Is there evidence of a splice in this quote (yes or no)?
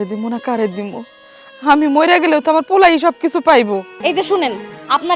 yes